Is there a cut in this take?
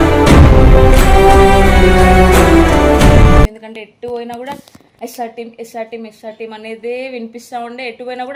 no; 0 cuts

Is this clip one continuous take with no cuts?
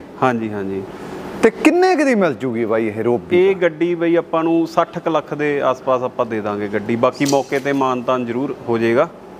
yes; 0 cuts

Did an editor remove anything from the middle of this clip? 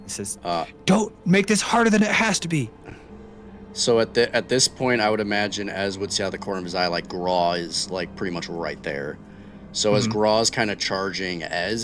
no; 0 cuts

